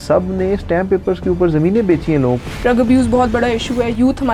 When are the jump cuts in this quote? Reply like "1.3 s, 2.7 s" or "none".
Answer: 2.4 s